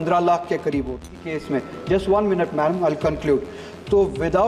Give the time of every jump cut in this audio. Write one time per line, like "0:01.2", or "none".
0:01.2